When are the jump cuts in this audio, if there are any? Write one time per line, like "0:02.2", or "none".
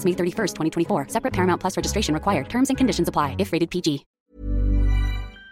0:04.1